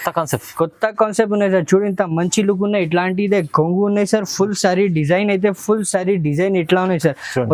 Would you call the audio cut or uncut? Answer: uncut